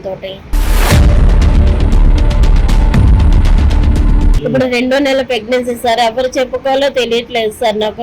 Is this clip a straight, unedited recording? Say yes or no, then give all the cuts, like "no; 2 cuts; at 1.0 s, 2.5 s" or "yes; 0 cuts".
no; 1 cut; at 4.3 s